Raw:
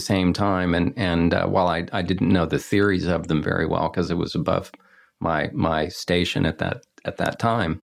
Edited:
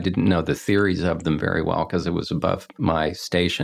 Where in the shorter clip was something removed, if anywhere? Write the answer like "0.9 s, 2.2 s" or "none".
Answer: 2.7 s